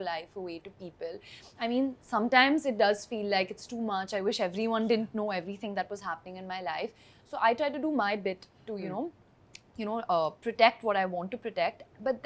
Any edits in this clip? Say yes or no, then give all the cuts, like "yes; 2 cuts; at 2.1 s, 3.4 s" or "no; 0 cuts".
no; 0 cuts